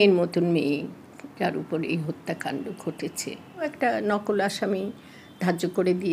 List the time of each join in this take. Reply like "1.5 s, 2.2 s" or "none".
3.7 s

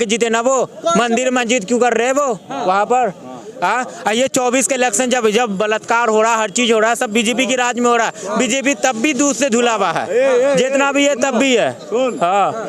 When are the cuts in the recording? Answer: none

